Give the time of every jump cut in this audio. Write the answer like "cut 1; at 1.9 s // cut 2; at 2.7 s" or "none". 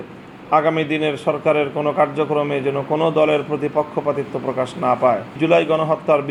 none